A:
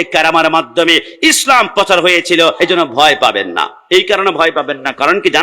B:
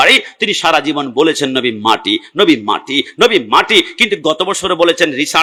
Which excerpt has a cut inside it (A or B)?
A